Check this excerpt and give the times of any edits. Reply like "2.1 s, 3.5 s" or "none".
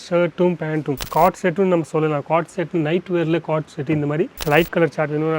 1.0 s, 4.4 s

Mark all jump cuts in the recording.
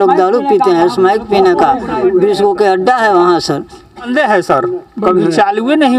4.1 s

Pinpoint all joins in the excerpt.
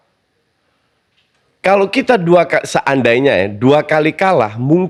none

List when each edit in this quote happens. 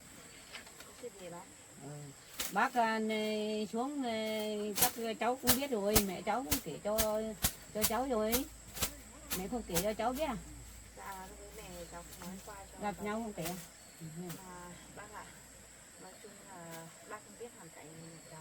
none

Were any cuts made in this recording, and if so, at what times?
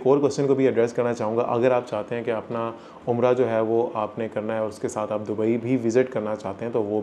none

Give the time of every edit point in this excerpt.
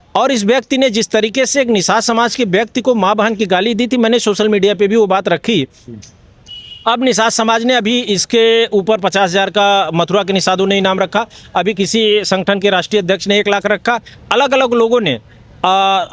none

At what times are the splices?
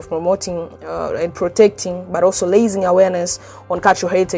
none

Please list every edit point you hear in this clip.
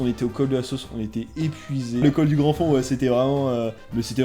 2.0 s

